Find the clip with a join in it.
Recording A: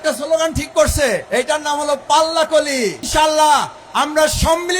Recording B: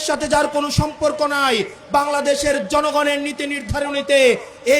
A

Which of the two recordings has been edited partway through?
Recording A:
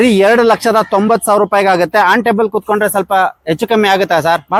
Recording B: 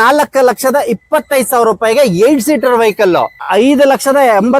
B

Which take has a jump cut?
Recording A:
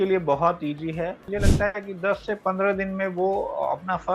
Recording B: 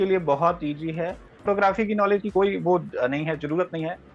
A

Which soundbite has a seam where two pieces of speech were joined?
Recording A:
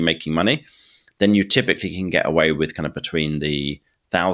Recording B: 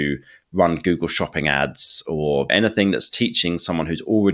B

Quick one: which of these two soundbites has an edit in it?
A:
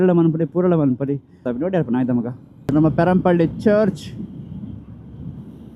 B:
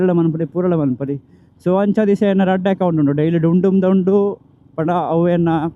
A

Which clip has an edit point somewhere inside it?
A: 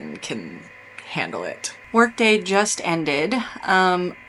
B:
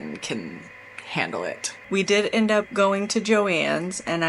B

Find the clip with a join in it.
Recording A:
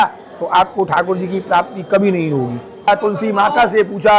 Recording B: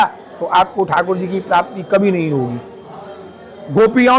A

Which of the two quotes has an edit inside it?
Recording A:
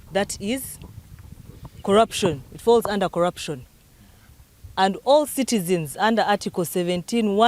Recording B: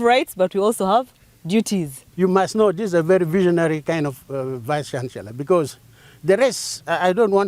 B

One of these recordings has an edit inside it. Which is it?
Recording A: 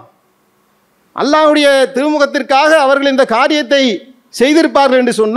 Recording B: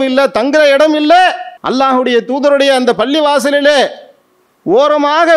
B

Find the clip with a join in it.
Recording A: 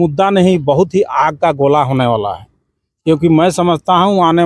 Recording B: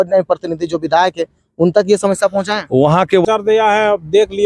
B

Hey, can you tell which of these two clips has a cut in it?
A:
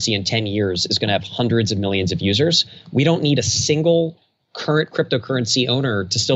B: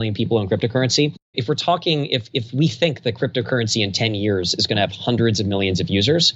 B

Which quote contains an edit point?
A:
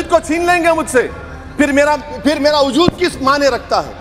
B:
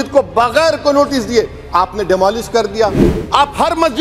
B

